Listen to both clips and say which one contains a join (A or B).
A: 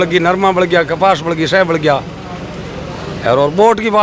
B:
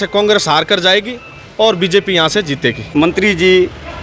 B